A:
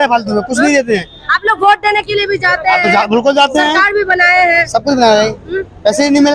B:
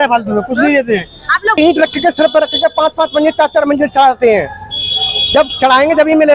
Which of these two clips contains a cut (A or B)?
B